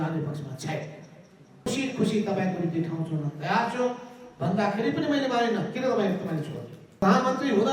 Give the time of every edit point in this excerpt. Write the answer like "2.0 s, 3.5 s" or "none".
1.6 s, 7.0 s